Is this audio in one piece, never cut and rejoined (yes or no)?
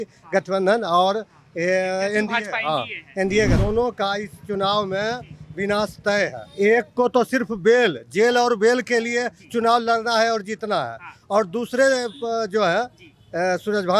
no